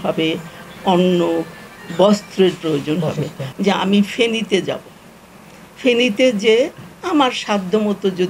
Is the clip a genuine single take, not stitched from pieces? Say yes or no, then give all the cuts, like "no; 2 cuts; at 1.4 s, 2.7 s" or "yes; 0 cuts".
no; 1 cut; at 3.4 s